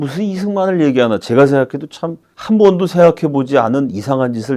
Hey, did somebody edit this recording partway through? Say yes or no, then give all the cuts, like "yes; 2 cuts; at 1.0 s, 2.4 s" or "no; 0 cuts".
no; 0 cuts